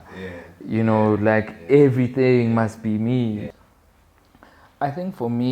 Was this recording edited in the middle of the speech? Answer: yes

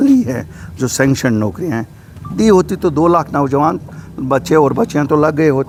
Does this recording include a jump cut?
no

